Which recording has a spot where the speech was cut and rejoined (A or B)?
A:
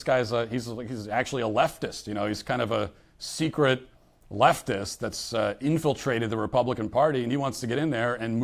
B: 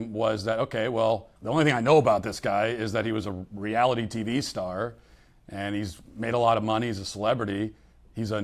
B